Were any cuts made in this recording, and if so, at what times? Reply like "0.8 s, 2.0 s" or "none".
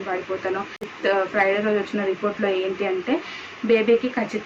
0.9 s